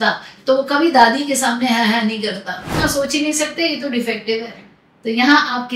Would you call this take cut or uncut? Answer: cut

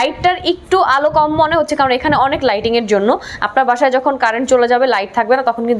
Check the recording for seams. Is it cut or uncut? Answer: uncut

